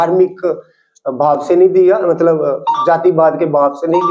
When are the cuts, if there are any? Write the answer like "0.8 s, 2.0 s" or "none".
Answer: none